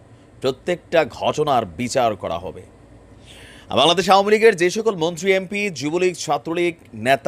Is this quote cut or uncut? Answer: uncut